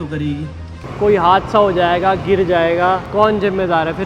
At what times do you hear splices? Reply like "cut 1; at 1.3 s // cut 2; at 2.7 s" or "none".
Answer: cut 1; at 0.8 s // cut 2; at 3.1 s